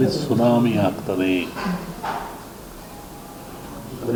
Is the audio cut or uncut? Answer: uncut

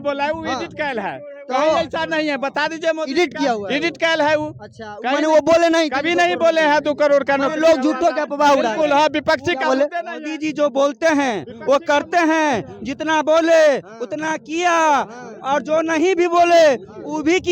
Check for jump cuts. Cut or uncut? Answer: uncut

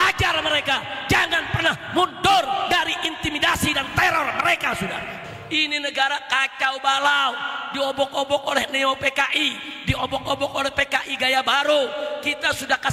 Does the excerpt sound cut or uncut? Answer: cut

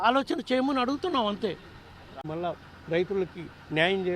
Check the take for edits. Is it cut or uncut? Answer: cut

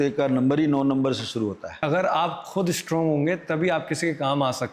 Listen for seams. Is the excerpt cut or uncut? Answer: cut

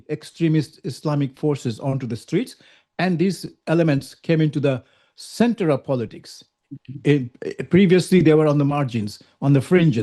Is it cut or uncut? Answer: uncut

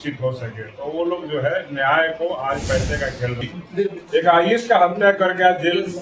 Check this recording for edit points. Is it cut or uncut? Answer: cut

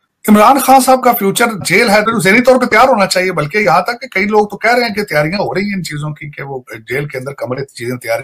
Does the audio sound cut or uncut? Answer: cut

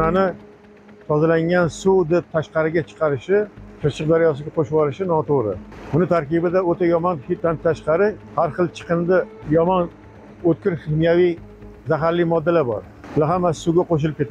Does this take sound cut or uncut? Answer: cut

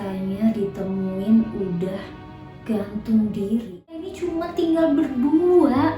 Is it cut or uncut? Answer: cut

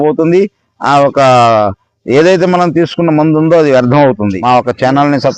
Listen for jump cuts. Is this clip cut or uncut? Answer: cut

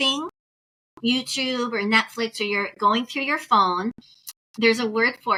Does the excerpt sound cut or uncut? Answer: uncut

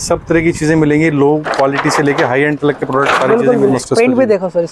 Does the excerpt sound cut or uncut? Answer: cut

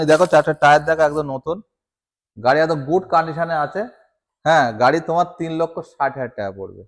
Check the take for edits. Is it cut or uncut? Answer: uncut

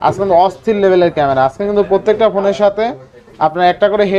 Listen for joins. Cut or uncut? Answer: uncut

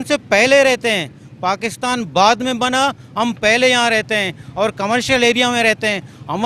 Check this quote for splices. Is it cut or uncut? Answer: uncut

